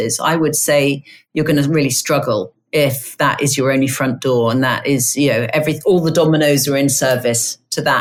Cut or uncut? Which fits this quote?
uncut